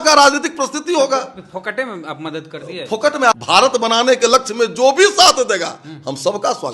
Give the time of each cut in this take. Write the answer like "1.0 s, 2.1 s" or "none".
3.3 s